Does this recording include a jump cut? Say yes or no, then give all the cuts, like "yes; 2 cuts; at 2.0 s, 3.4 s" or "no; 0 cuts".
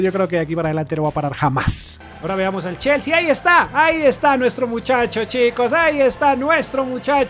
yes; 1 cut; at 1.9 s